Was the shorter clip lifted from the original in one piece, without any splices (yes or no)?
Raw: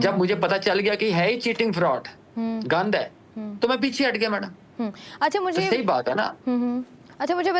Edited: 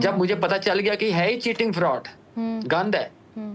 yes